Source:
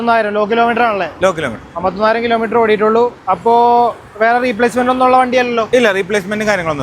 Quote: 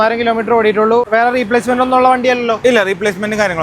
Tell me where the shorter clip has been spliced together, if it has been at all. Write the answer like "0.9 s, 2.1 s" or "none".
1.1 s